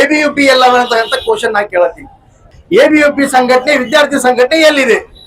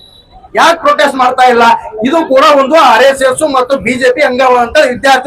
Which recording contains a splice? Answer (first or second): first